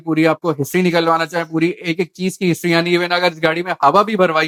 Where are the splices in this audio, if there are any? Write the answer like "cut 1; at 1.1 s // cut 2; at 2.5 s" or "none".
none